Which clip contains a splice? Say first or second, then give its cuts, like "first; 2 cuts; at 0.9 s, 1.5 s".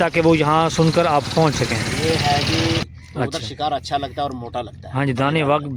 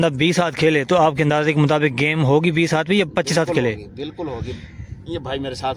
first; 1 cut; at 2.9 s